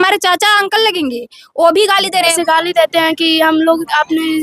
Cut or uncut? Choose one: cut